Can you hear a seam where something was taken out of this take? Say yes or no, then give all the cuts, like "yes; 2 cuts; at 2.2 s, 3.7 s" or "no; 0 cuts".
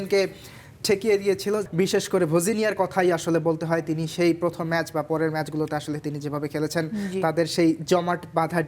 yes; 1 cut; at 1.6 s